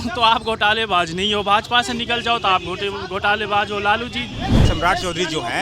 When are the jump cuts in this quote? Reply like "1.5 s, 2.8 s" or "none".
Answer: 4.6 s